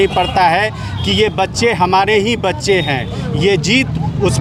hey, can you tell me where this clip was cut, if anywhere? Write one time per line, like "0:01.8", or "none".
none